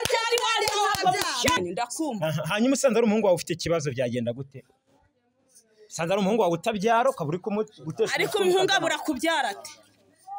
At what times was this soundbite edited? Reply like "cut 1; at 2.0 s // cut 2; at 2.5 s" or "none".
cut 1; at 1.6 s